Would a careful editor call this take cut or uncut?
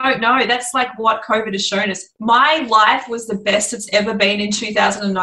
cut